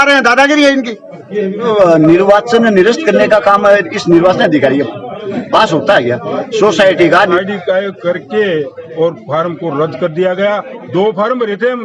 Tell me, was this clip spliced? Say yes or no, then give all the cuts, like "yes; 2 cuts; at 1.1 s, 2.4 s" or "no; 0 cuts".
yes; 2 cuts; at 1.6 s, 7.2 s